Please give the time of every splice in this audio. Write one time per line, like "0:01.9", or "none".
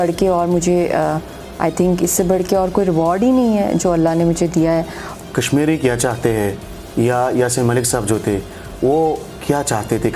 0:05.0